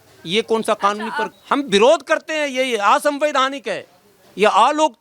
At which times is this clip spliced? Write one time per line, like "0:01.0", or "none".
0:01.3